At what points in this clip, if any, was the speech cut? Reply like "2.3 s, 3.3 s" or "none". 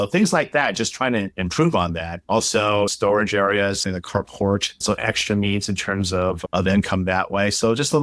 2.9 s